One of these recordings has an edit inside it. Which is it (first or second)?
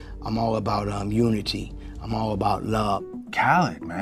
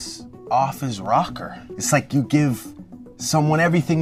first